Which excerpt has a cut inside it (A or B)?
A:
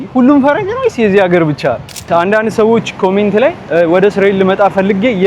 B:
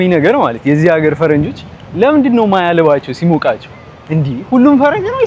A